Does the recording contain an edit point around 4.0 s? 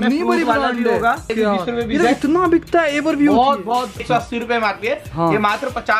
yes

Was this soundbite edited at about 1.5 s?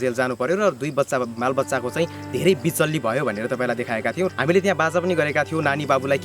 no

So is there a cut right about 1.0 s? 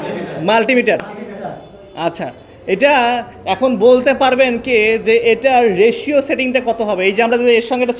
yes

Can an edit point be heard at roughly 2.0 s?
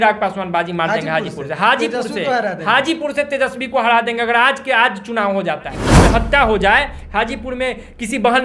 no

